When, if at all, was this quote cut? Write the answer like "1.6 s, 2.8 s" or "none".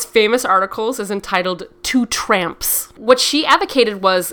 2.9 s